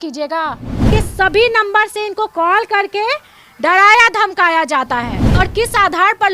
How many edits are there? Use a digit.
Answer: 2